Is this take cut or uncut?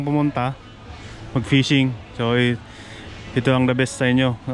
uncut